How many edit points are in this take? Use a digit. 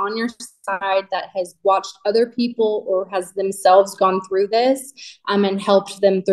0